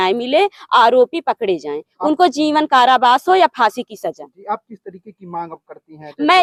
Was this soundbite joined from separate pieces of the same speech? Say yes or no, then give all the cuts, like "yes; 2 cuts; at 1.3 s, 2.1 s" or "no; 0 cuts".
no; 0 cuts